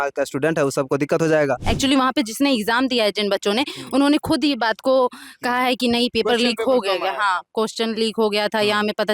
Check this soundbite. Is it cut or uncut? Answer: cut